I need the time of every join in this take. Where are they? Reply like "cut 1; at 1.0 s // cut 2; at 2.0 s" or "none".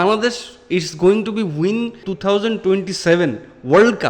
cut 1; at 2.1 s